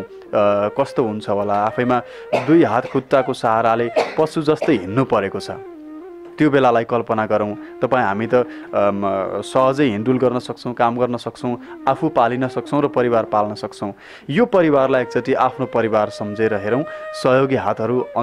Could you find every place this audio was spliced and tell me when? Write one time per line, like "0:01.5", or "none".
none

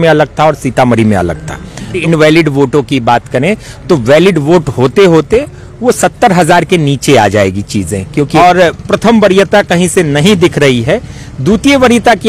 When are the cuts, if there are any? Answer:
0:02.0
0:08.3

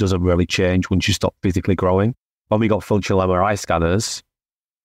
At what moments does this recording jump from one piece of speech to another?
0:02.3

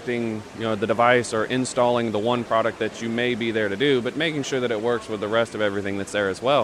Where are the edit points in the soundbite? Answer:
none

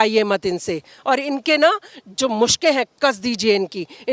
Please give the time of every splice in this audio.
none

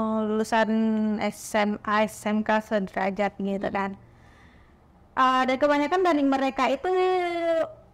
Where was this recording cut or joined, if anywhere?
none

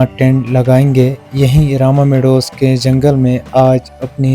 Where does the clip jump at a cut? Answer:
none

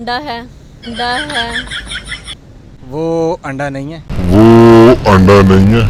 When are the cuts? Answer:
none

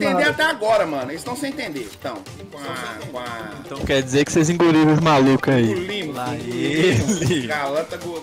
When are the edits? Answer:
0:02.8

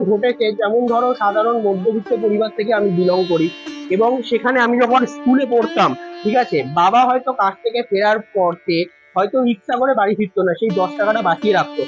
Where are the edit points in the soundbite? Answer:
none

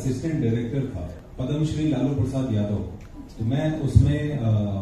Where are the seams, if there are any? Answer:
0:01.1

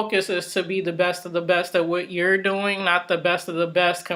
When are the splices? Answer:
none

